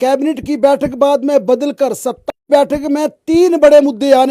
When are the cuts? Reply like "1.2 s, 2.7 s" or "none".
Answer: 2.3 s